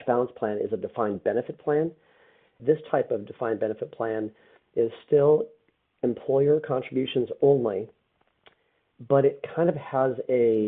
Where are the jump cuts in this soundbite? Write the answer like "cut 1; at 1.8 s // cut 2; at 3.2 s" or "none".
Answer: cut 1; at 2.6 s